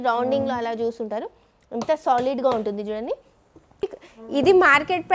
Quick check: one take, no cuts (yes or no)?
no